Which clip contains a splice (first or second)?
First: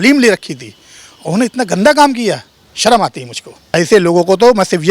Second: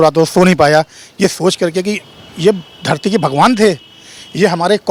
first